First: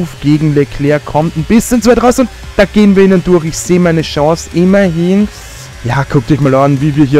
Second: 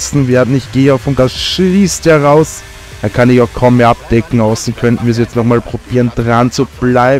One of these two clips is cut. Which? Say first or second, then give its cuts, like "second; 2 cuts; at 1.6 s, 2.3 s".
second; 1 cut; at 1.1 s